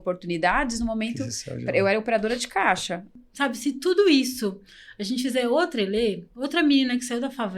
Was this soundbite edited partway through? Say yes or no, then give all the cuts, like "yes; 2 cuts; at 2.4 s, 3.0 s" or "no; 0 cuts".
yes; 1 cut; at 3.2 s